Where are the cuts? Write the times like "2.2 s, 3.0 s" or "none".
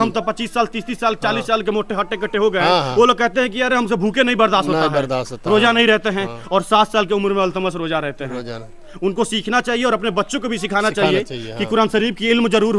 none